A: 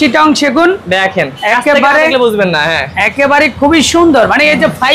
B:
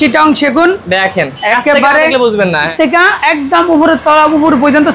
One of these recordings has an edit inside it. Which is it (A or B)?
B